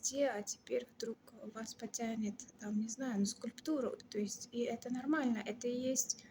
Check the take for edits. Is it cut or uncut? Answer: uncut